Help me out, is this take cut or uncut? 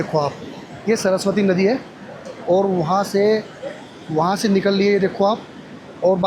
uncut